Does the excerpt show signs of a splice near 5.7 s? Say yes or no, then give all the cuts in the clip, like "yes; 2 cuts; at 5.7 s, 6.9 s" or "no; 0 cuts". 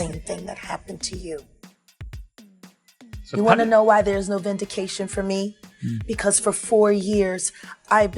no; 2 cuts; at 1.5 s, 3.3 s